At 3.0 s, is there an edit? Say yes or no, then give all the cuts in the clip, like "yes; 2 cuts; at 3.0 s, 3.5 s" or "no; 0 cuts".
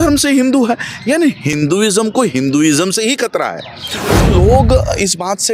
no; 2 cuts; at 1.5 s, 4.2 s